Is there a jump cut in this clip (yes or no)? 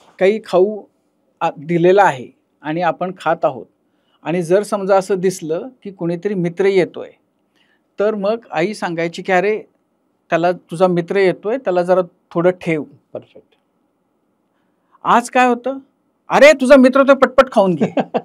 no